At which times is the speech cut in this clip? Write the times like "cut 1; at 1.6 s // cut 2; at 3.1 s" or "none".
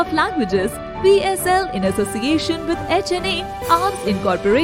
none